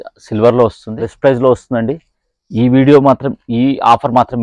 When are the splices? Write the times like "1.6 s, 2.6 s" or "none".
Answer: 1.1 s